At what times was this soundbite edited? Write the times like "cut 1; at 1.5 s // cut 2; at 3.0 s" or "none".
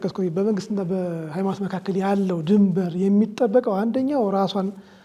none